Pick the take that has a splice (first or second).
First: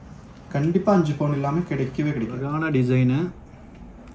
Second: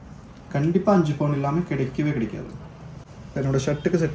first